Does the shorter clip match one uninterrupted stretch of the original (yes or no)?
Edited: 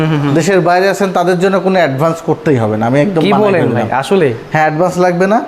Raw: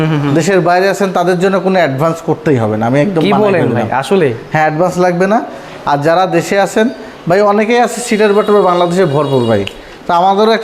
yes